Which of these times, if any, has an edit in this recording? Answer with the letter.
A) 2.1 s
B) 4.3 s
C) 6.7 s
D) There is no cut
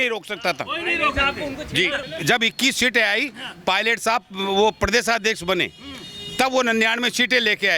A